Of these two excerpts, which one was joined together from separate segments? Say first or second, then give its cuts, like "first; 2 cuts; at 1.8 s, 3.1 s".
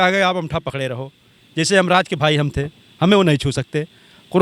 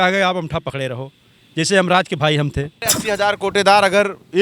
second; 1 cut; at 2.9 s